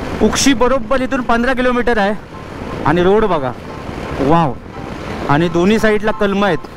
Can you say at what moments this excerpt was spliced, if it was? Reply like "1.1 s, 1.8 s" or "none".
none